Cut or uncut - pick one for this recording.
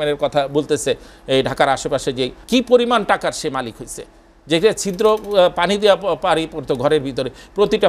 cut